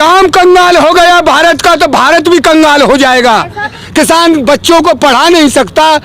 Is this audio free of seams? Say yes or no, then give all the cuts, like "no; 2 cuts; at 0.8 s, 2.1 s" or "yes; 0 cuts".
no; 1 cut; at 3.8 s